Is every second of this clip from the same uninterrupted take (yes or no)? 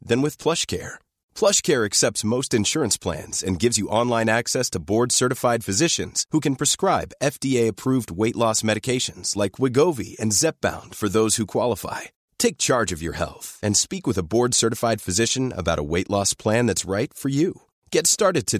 yes